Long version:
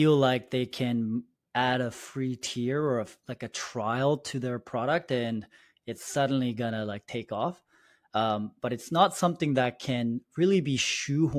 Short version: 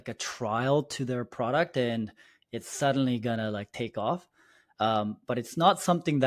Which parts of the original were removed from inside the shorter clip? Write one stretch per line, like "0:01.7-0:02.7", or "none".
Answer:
none